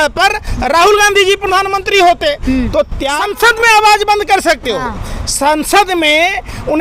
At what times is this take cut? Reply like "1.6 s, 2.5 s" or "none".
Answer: 3.0 s